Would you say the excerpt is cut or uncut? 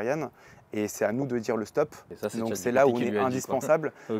cut